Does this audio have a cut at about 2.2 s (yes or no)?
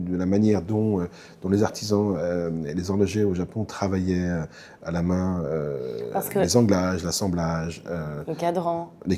no